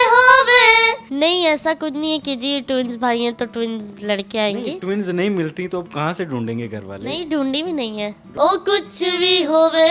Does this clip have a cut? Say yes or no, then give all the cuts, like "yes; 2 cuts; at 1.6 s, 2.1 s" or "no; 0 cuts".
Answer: yes; 2 cuts; at 1.0 s, 8.3 s